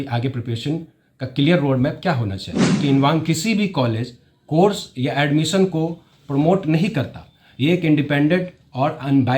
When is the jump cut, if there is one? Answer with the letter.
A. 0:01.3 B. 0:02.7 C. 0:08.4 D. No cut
B